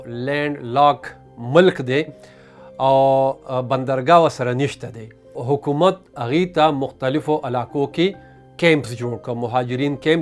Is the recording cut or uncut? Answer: cut